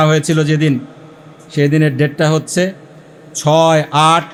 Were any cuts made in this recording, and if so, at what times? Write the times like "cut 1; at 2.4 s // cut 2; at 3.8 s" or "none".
none